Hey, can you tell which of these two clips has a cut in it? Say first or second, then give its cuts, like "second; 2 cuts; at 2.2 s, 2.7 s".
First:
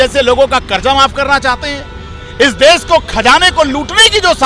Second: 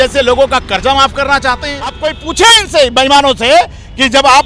second; 1 cut; at 2.1 s